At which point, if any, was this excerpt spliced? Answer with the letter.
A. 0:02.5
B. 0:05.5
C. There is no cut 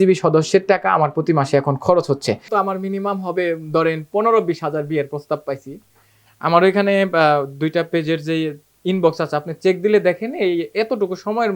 A